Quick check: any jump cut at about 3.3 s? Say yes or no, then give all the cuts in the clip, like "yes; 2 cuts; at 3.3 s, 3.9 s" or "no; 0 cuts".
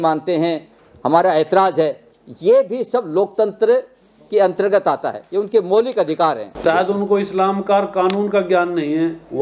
no; 1 cut; at 6.5 s